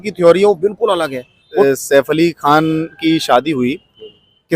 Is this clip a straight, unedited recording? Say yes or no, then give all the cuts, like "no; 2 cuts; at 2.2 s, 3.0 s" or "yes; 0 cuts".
no; 1 cut; at 1.6 s